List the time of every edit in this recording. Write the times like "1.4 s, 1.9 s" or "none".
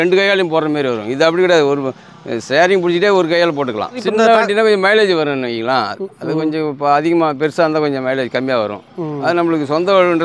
4.0 s